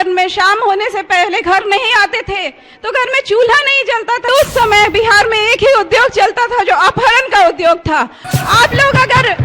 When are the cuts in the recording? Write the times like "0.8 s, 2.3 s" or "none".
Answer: 4.3 s, 8.2 s